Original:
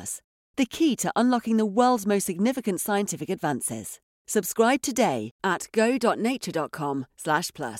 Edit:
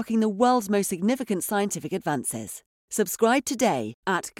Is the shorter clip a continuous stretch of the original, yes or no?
yes